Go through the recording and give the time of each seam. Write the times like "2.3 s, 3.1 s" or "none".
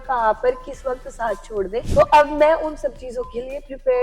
1.9 s